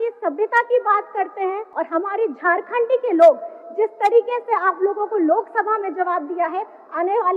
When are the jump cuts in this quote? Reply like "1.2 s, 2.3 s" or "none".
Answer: 1.7 s